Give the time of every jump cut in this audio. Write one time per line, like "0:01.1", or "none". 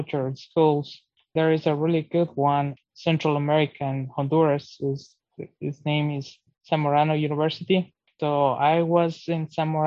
0:02.8